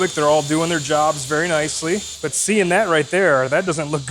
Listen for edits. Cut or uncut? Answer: cut